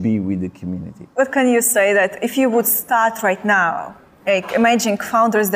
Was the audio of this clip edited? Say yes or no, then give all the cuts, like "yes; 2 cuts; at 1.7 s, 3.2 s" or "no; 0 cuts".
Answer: yes; 1 cut; at 1.0 s